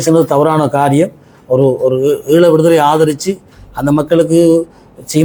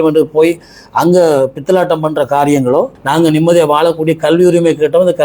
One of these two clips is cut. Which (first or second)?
second